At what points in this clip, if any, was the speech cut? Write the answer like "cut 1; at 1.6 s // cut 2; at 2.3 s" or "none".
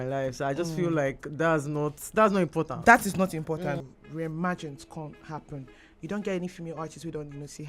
cut 1; at 3.8 s